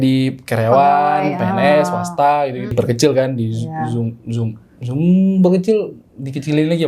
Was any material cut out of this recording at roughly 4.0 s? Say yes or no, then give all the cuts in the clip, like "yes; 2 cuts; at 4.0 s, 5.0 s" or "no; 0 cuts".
no; 1 cut; at 2.7 s